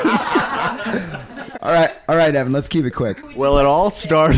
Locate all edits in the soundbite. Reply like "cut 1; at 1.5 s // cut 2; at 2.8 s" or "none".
cut 1; at 1.4 s // cut 2; at 3.2 s